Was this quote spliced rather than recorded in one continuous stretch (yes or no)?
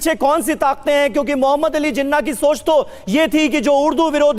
no